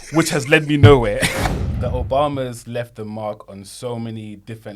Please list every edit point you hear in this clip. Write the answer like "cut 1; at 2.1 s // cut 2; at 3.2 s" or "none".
cut 1; at 1.3 s